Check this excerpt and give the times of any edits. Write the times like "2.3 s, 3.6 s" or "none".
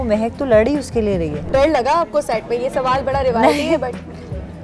1.5 s